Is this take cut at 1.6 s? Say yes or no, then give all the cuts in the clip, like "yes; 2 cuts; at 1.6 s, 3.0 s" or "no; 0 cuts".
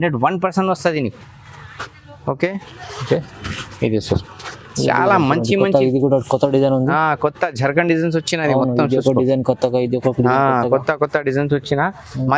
no; 0 cuts